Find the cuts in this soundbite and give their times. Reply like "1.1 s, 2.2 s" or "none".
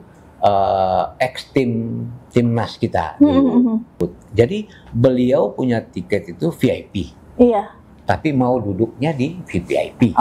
3.9 s